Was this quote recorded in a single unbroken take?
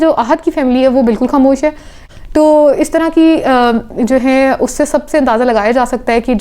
no; 1 cut; at 1.9 s

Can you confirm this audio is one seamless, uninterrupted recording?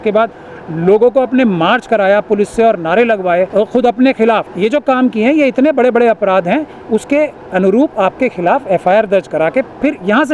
no; 2 cuts; at 3.5 s, 4.5 s

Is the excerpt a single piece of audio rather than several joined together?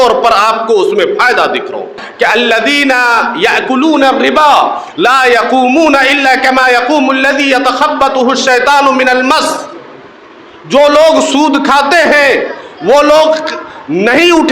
no; 1 cut; at 2.0 s

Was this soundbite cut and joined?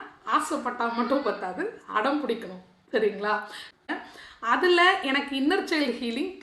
yes; 1 cut; at 3.7 s

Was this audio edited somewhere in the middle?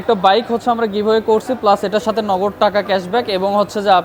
no; 0 cuts

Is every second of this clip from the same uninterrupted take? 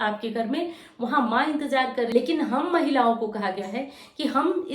no; 1 cut; at 2.1 s

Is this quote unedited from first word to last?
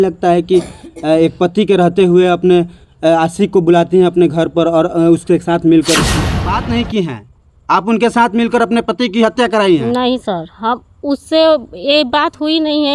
no; 1 cut; at 6.1 s

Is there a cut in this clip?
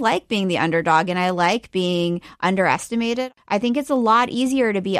yes; 1 cut; at 3.2 s

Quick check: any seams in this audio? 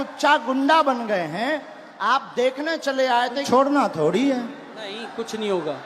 yes; 1 cut; at 3.4 s

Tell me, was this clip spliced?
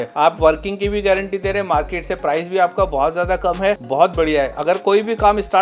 no; 0 cuts

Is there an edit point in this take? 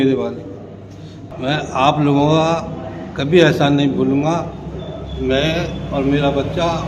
yes; 1 cut; at 1.2 s

